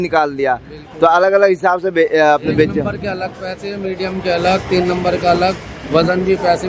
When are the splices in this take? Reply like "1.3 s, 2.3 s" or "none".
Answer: none